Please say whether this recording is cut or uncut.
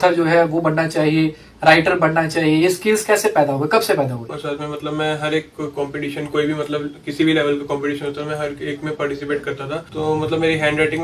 cut